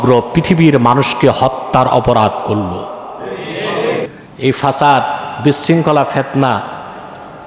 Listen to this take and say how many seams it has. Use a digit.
1